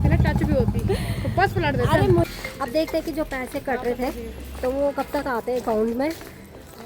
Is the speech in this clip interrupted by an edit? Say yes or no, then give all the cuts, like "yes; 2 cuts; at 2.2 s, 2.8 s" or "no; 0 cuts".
yes; 1 cut; at 2.3 s